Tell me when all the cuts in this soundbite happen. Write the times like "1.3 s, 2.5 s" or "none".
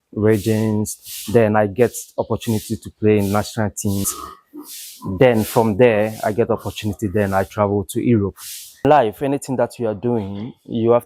4.1 s, 8.8 s